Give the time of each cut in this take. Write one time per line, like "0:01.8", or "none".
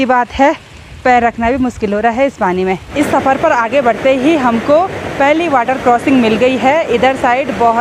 0:02.9